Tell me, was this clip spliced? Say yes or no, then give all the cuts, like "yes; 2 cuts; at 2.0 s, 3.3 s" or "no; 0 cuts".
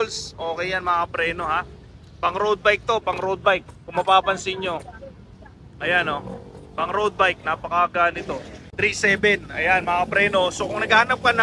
yes; 1 cut; at 8.6 s